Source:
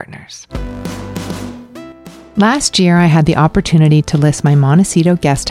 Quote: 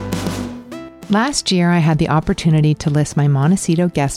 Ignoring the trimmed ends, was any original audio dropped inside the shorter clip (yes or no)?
yes